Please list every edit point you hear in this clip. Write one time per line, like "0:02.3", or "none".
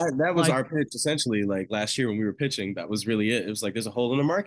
none